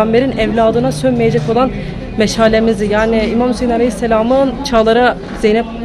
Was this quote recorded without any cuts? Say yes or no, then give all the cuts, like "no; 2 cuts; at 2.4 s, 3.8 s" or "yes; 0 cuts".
no; 1 cut; at 1.8 s